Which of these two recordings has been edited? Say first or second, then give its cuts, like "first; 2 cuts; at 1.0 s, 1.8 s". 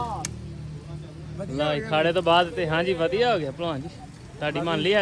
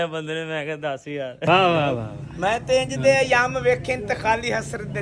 second; 1 cut; at 1.4 s